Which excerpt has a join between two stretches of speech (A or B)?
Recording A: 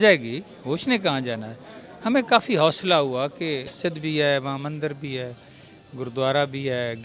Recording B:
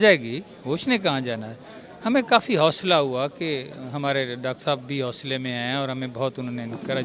A